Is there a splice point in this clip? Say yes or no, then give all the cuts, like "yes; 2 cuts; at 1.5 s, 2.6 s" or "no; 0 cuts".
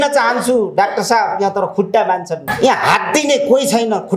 yes; 1 cut; at 2.5 s